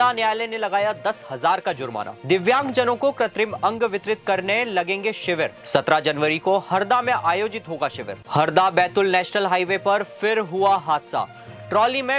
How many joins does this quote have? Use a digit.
2